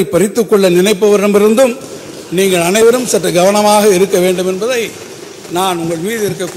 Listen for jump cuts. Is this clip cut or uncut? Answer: uncut